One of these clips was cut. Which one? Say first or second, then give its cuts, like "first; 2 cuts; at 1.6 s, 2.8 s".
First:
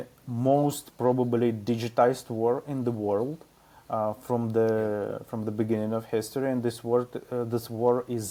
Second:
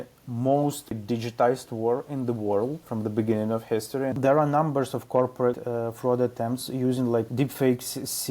second; 5 cuts; at 1.0 s, 2.9 s, 4.1 s, 5.6 s, 7.3 s